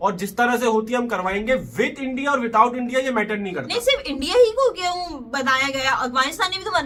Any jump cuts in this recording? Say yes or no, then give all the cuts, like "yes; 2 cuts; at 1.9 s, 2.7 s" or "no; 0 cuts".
no; 0 cuts